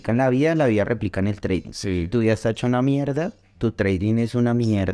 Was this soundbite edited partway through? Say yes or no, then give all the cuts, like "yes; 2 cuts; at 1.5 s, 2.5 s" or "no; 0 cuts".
no; 0 cuts